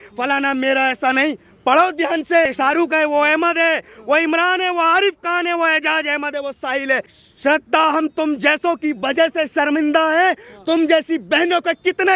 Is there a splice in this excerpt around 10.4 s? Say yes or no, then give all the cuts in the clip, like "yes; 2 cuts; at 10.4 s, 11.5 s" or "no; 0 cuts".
no; 2 cuts; at 2.5 s, 7.1 s